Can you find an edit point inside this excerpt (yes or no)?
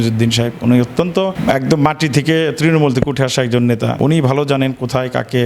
yes